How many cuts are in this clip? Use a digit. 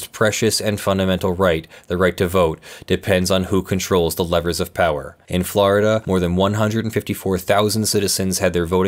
2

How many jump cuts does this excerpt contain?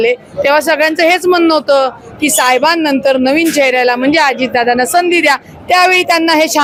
0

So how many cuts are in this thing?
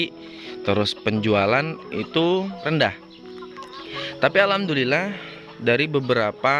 1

